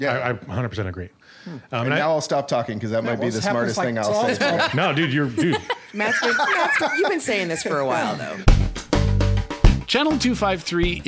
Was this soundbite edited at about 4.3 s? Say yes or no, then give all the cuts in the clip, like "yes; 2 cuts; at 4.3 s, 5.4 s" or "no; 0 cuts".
no; 1 cut; at 8.4 s